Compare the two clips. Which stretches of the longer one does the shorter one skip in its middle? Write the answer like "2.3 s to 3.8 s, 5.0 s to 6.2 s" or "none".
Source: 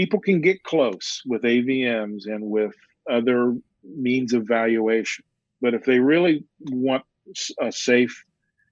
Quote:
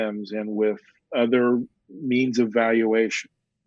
none